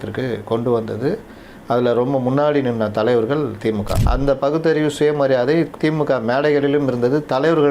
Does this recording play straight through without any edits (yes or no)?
no